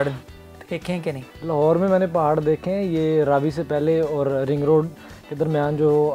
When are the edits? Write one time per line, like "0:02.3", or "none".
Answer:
0:01.3